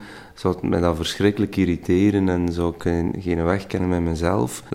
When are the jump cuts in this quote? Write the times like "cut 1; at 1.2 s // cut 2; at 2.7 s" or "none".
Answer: none